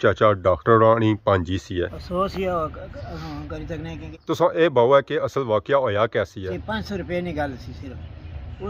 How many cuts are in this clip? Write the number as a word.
three